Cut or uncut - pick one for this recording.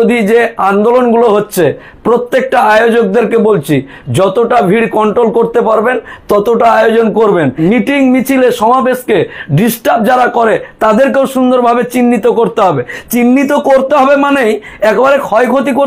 cut